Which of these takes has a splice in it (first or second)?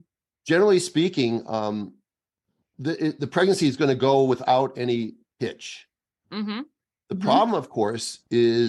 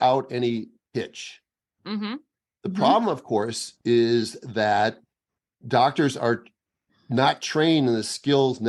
second